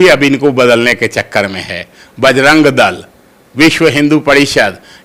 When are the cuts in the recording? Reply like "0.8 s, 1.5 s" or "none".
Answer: none